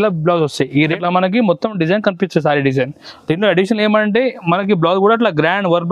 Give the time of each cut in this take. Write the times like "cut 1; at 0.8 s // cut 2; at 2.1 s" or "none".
cut 1; at 0.9 s